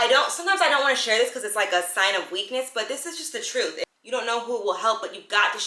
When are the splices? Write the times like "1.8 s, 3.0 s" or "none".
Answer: 3.9 s

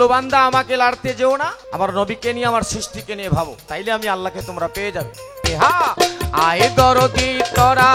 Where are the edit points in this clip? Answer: 1.6 s, 3.6 s, 5.4 s

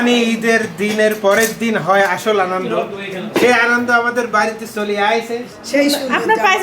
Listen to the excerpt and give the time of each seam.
5.4 s

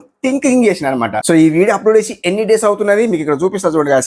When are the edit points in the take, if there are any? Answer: 1.2 s

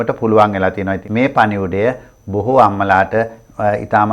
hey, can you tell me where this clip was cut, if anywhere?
1.0 s

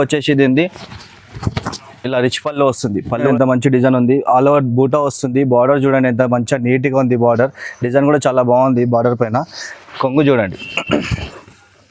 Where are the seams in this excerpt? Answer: 3.2 s

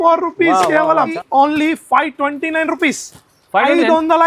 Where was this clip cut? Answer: 1.2 s

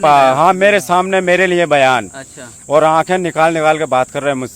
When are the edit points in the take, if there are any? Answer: none

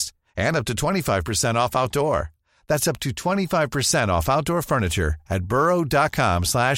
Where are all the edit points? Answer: none

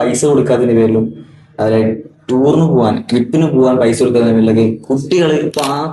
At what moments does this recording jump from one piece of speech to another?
none

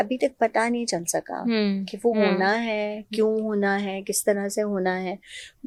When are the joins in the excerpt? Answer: none

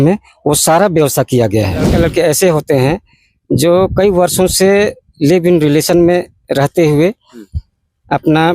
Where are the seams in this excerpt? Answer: 1.9 s

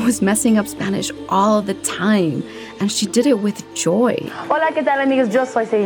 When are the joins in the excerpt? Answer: 4.3 s

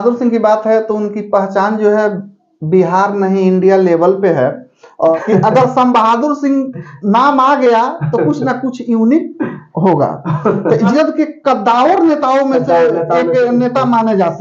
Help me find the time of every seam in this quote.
5.2 s, 10.9 s

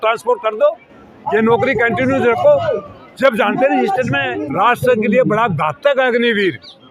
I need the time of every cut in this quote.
4.3 s

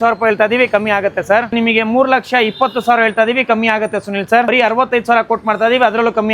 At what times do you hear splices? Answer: 1.5 s, 4.5 s

